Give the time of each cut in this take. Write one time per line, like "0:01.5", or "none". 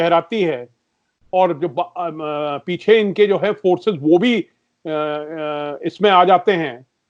none